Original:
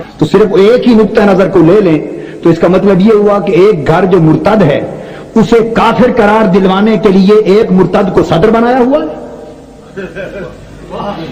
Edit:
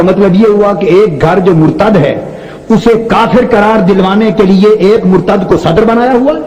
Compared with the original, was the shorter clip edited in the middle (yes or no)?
no